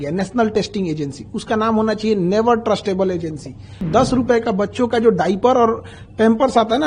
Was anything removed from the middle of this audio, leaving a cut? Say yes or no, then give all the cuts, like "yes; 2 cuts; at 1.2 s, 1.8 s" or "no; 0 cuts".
yes; 1 cut; at 3.8 s